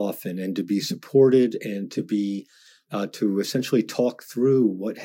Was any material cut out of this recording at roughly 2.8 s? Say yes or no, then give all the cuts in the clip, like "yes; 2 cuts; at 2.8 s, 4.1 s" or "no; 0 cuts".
yes; 1 cut; at 2.8 s